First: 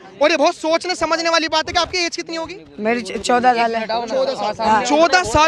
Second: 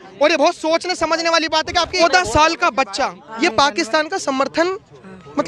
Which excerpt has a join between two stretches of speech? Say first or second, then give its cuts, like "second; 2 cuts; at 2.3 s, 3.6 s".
second; 2 cuts; at 2.0 s, 3.2 s